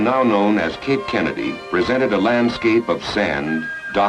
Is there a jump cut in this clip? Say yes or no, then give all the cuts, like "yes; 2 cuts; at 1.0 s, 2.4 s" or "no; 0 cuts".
no; 0 cuts